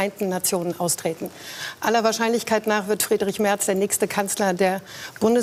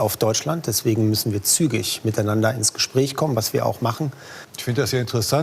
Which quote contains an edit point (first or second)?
second